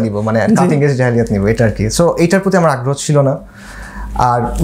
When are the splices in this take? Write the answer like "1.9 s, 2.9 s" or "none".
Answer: none